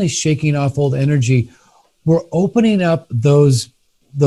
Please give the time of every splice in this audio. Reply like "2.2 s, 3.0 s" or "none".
none